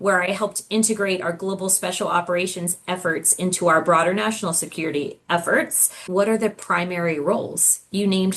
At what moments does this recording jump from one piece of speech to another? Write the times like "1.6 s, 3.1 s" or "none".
5.9 s